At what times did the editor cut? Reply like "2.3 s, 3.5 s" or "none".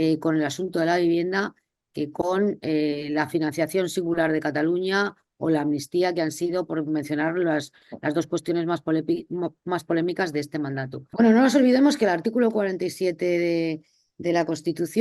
11.0 s